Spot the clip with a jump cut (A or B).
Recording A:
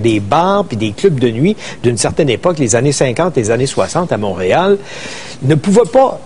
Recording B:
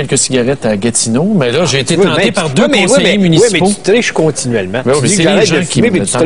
A